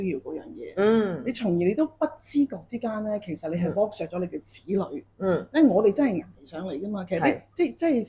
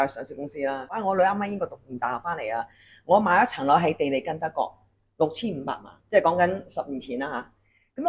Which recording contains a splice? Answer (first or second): second